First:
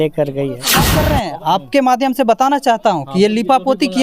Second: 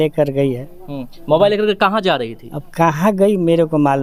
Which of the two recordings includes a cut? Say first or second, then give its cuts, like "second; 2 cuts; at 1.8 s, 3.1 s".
first; 1 cut; at 0.9 s